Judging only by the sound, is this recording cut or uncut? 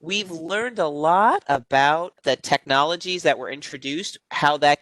cut